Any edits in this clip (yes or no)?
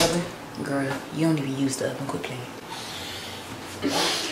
no